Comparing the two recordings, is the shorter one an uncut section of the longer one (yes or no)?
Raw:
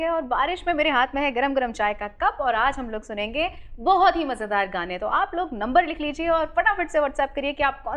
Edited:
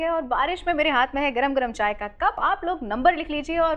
no